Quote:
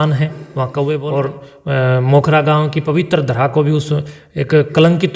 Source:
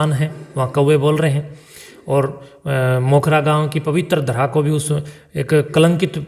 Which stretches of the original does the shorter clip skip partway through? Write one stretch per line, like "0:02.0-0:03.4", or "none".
0:01.1-0:02.1